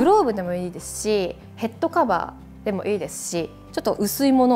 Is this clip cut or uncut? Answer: cut